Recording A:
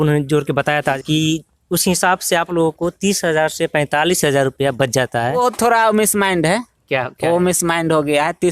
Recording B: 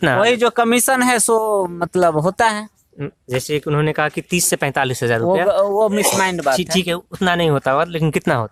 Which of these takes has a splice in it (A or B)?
A